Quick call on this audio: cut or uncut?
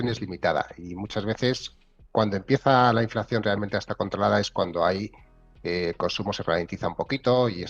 uncut